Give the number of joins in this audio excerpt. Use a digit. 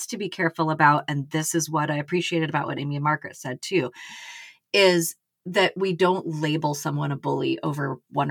0